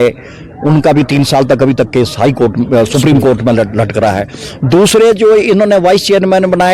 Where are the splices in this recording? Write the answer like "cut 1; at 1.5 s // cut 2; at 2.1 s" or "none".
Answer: none